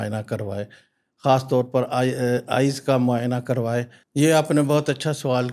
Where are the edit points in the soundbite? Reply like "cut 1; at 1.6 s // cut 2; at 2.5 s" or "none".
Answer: cut 1; at 4.0 s

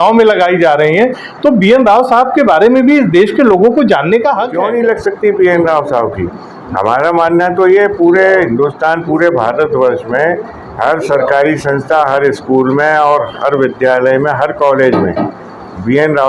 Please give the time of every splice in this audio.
cut 1; at 4.5 s

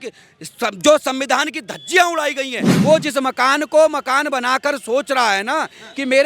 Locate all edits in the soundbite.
cut 1; at 2.6 s

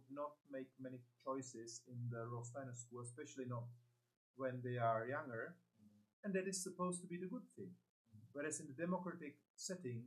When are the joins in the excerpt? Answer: none

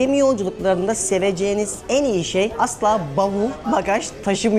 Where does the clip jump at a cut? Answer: cut 1; at 2.5 s

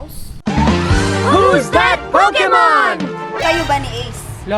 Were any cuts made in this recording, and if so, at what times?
cut 1; at 3.4 s

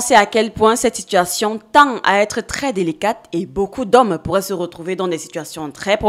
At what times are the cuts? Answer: none

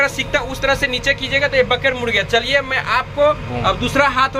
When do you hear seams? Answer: none

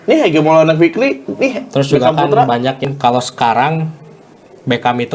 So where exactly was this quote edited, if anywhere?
cut 1; at 2.8 s

